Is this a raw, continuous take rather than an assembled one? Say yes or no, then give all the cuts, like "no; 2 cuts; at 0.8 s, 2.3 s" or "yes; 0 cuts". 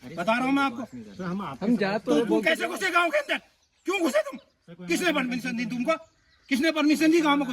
yes; 0 cuts